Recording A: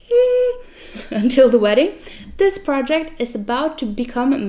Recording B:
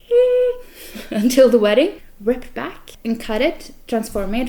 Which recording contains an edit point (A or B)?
B